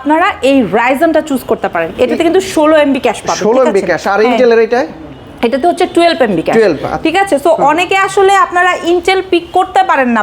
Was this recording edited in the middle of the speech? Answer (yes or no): no